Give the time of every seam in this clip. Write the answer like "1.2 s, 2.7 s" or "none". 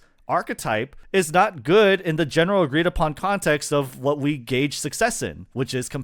1.0 s